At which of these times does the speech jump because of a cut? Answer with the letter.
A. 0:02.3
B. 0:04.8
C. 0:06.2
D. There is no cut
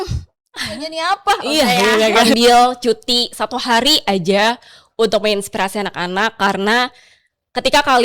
A